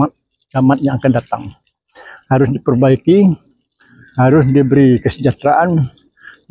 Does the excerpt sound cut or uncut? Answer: uncut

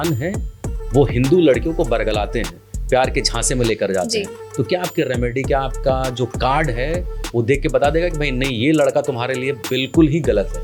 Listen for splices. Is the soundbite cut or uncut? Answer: uncut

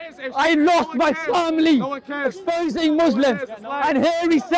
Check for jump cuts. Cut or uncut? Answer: uncut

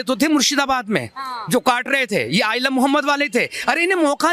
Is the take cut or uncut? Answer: uncut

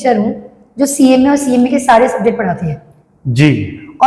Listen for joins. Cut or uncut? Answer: uncut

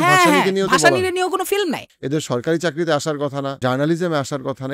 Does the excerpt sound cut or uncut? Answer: cut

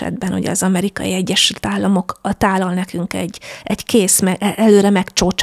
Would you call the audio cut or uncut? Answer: uncut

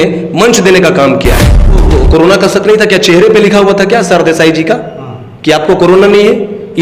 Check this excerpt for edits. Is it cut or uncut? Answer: cut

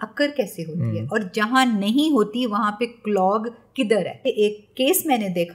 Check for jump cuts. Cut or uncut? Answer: cut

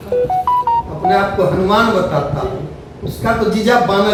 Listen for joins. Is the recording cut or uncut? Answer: uncut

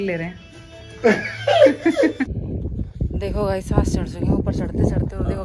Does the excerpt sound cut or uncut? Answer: cut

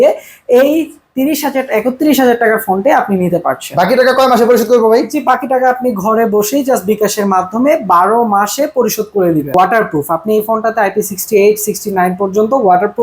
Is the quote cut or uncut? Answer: cut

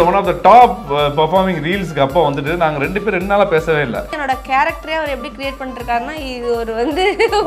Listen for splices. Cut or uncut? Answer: cut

